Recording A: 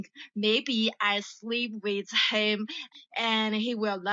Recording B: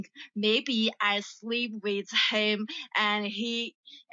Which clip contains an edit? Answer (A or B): A